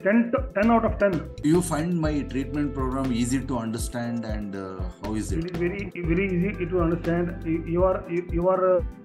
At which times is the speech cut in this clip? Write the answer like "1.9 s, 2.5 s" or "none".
1.4 s